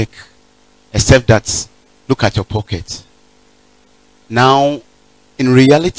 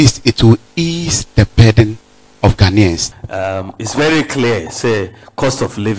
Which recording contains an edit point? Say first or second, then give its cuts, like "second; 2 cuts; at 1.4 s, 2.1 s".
second; 1 cut; at 3.1 s